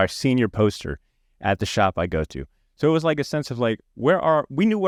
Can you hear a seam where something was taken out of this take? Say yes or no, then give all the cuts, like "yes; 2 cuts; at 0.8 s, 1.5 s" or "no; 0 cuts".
no; 0 cuts